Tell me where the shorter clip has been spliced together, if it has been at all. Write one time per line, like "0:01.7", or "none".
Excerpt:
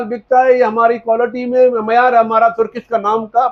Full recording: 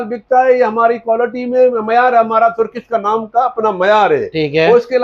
none